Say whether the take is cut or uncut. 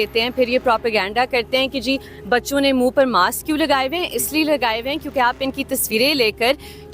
uncut